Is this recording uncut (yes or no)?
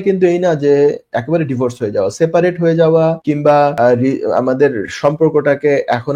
no